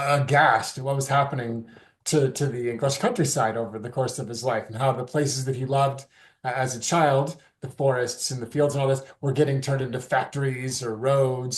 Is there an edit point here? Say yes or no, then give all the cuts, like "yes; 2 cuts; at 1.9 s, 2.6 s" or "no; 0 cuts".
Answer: no; 0 cuts